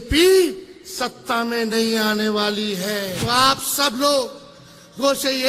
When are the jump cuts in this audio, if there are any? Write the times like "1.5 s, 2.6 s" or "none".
3.2 s